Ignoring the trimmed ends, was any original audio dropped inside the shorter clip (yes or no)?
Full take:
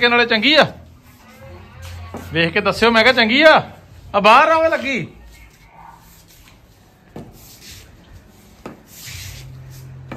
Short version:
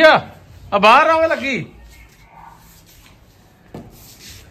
no